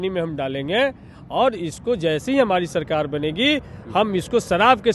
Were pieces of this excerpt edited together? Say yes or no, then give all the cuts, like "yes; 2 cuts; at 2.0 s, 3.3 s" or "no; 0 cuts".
no; 0 cuts